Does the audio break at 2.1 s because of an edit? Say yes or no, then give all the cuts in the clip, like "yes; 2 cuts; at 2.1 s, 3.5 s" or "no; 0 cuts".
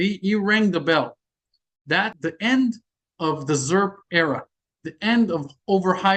yes; 1 cut; at 2.1 s